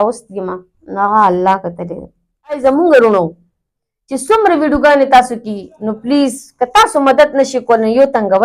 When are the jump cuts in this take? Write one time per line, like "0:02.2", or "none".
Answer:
0:02.6